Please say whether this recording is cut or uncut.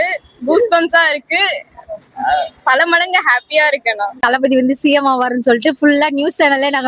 cut